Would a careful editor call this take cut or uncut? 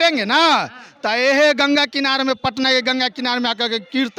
uncut